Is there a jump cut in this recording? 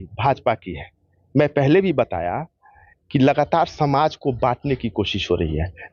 no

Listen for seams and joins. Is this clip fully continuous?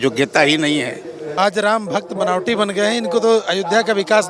no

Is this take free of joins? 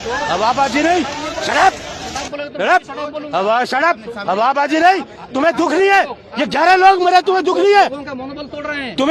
yes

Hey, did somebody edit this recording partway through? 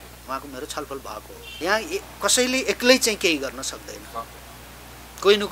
yes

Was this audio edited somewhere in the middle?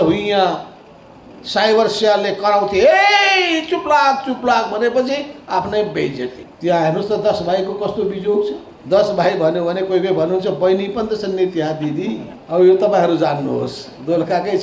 yes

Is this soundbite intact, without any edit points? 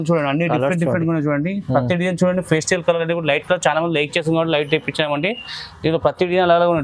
yes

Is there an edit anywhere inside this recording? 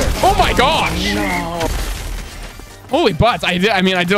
no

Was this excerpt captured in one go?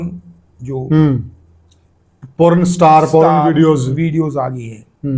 yes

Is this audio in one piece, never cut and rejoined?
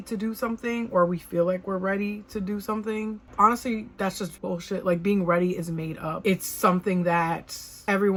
yes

